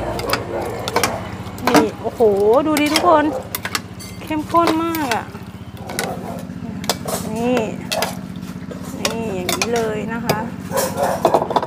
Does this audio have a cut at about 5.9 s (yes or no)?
yes